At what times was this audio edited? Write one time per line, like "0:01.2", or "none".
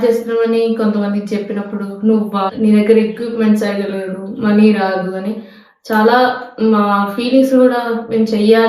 0:02.5